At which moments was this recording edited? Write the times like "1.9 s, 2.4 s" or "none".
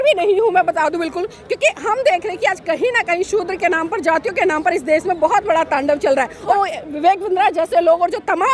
6.5 s